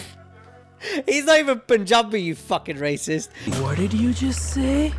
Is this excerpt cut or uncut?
uncut